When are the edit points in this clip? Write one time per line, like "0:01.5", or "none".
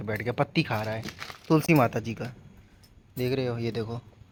none